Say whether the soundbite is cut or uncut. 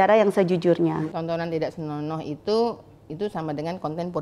cut